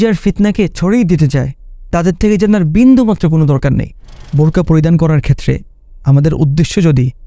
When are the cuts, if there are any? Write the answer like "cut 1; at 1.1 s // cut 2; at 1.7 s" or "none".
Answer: cut 1; at 4.0 s